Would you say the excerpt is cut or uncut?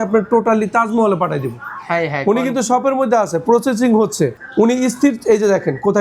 cut